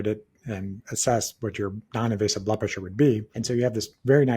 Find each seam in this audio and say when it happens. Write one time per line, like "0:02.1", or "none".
0:01.8
0:03.3